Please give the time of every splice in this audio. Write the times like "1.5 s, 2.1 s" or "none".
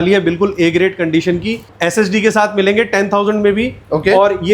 1.7 s